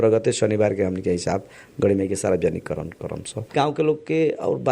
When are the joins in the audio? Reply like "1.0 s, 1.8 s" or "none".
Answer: 3.5 s